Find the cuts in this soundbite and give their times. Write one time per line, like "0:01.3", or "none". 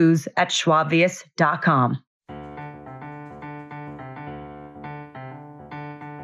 0:02.3